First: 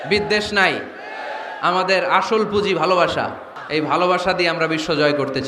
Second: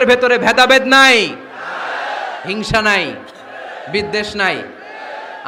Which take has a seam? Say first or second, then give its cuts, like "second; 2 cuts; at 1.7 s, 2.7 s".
first; 1 cut; at 3.5 s